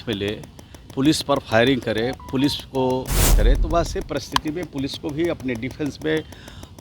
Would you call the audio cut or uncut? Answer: cut